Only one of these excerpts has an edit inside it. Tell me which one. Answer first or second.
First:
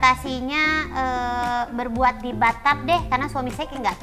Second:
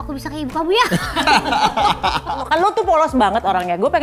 second